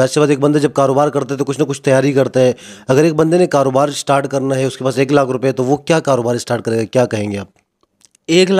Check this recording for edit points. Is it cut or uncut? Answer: uncut